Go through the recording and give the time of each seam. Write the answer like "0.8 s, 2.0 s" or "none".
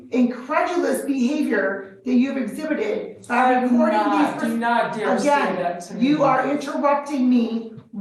none